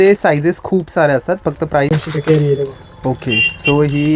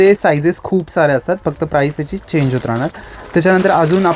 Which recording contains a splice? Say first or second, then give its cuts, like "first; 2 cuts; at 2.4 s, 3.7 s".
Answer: first; 1 cut; at 1.9 s